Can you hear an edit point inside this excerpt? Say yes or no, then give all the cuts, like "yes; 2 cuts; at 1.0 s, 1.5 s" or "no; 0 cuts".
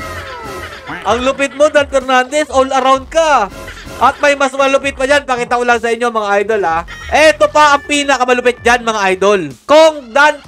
yes; 2 cuts; at 6.8 s, 9.6 s